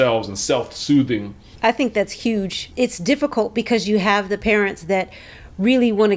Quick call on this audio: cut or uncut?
cut